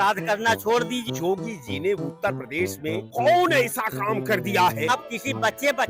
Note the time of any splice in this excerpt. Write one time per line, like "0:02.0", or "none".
0:01.1
0:04.9